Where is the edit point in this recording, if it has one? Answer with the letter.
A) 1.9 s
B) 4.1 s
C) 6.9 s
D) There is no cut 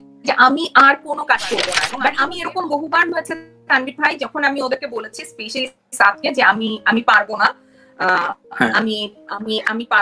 A